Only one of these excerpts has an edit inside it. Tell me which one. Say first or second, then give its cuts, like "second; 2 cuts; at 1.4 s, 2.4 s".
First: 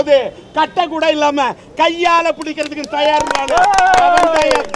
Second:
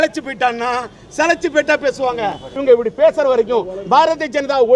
second; 1 cut; at 2.5 s